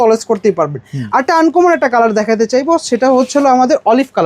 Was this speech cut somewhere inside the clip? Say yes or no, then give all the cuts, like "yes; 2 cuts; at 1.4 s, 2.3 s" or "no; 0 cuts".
no; 0 cuts